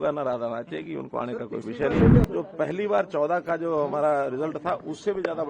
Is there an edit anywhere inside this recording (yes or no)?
yes